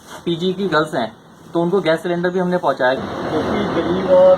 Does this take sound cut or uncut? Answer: cut